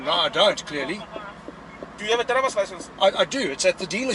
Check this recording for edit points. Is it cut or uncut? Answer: uncut